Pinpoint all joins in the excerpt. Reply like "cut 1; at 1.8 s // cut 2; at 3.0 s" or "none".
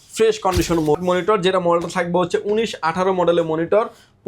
cut 1; at 1.0 s